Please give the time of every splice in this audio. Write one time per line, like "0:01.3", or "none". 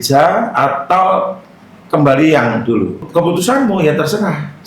0:03.0